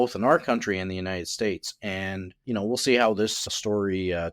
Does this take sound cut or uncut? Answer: cut